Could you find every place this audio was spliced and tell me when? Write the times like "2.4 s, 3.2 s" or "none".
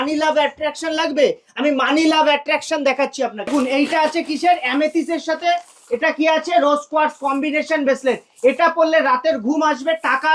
3.5 s